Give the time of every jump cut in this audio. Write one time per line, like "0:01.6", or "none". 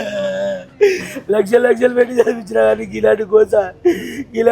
0:01.1